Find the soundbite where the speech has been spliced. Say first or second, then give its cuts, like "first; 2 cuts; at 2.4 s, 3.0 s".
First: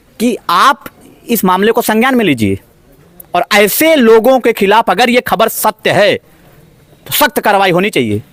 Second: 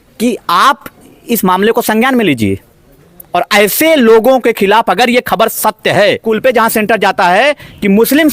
second; 1 cut; at 6.2 s